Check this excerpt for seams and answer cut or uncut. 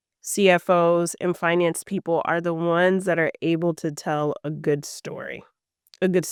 uncut